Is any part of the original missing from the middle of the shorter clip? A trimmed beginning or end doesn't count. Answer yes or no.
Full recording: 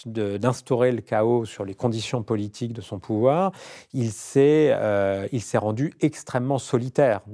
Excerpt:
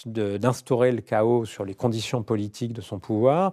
no